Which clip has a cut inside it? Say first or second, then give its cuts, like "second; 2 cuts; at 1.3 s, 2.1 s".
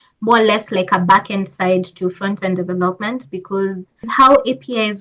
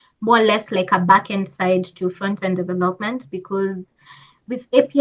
first; 1 cut; at 4.1 s